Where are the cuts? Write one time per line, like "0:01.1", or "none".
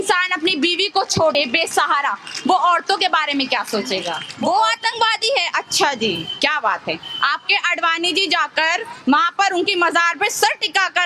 0:01.3
0:04.2